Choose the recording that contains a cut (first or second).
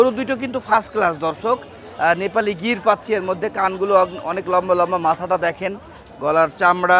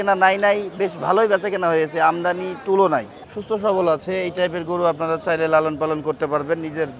second